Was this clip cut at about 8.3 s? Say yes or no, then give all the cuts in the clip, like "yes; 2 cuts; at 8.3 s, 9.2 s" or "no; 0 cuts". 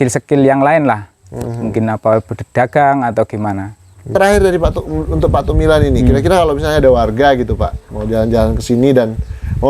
no; 1 cut; at 4.1 s